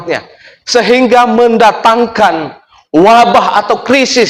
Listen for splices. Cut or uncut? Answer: uncut